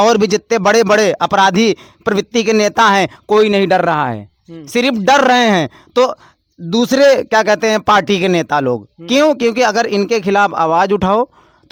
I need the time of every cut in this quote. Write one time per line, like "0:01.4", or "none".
none